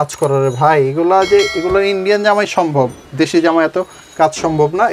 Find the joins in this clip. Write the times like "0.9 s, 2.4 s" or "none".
none